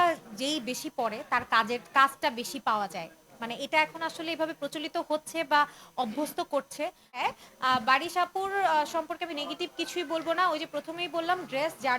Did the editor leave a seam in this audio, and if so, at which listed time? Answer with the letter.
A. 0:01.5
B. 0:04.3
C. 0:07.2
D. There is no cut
C